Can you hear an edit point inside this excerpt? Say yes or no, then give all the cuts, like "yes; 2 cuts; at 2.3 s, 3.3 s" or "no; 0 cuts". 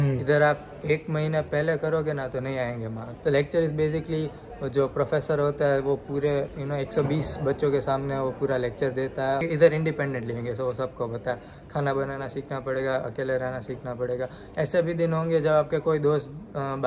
yes; 2 cuts; at 3.1 s, 9.4 s